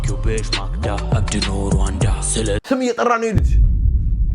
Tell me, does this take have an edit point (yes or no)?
yes